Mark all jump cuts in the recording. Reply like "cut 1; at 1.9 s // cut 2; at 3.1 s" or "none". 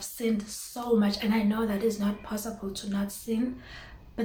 none